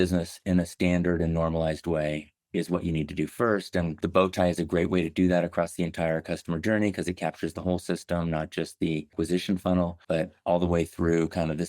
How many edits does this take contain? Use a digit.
3